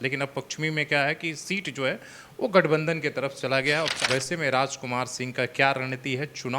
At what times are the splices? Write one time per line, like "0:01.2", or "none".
0:04.0